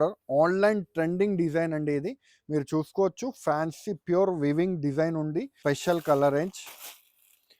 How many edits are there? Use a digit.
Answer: 1